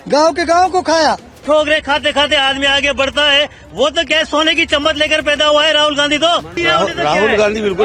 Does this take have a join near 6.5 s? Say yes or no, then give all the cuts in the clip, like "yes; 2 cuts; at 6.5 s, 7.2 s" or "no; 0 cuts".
yes; 2 cuts; at 1.4 s, 6.5 s